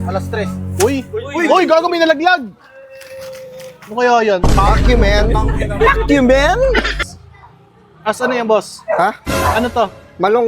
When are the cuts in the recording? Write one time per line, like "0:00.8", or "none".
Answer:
0:07.0